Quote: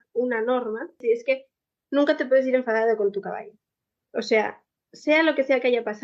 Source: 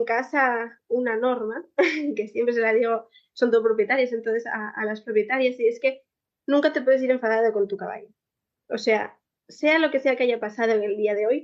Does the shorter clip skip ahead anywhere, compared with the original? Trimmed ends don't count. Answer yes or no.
yes